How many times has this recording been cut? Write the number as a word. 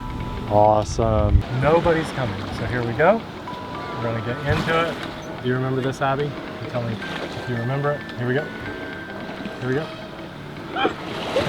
one